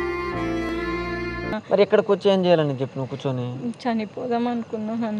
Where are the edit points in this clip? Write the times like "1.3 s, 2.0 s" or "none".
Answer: 1.5 s